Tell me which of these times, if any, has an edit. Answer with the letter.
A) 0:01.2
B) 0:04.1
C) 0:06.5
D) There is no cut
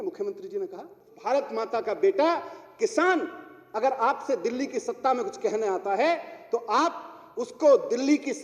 A